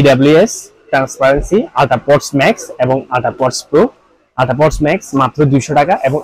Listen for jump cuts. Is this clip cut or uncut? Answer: uncut